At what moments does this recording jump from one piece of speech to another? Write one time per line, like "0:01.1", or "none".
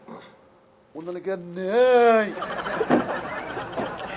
0:02.5